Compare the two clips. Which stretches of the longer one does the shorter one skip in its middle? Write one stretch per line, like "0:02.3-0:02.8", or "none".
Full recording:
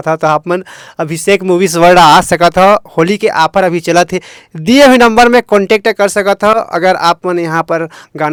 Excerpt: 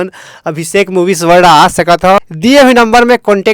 0:02.7-0:04.4